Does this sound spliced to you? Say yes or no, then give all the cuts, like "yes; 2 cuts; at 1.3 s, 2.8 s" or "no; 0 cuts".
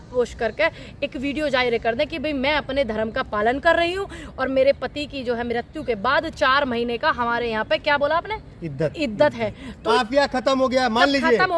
yes; 1 cut; at 9.8 s